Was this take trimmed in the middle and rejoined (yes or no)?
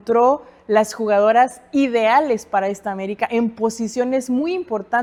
no